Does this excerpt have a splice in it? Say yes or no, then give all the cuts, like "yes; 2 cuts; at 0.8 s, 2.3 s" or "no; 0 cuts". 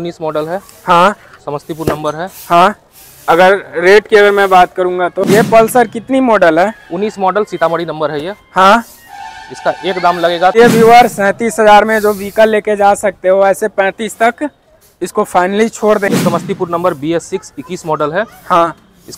yes; 3 cuts; at 5.2 s, 10.5 s, 16.1 s